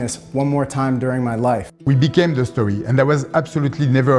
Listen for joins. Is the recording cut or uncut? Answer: cut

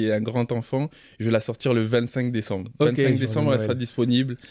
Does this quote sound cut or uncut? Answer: uncut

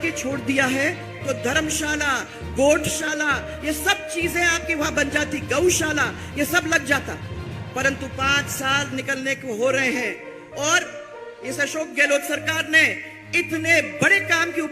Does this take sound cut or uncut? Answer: cut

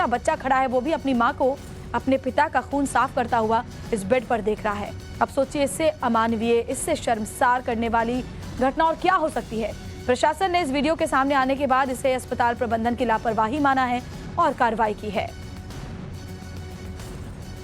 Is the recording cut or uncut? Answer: cut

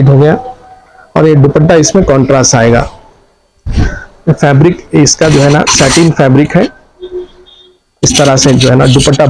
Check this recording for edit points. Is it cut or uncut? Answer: uncut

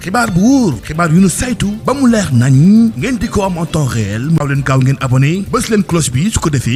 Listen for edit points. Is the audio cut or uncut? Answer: uncut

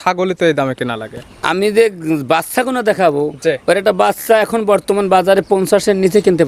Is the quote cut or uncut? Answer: uncut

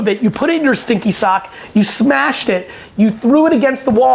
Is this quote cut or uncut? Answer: uncut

